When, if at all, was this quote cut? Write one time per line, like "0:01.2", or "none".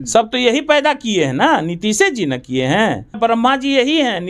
0:03.2